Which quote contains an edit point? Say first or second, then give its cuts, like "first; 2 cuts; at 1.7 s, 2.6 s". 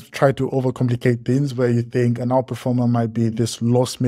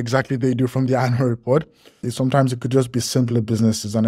second; 1 cut; at 2.0 s